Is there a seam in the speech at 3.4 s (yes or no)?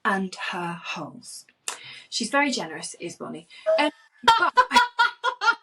no